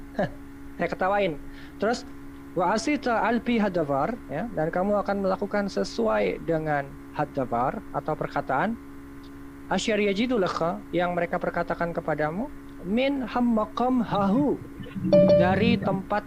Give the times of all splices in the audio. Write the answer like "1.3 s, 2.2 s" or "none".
none